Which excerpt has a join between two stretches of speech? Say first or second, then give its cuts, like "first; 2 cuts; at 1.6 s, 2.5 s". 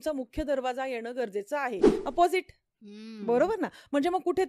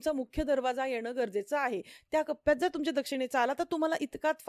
first; 1 cut; at 2.0 s